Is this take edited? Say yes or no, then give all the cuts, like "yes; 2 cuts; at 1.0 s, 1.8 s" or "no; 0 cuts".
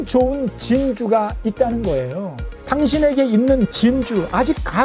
no; 0 cuts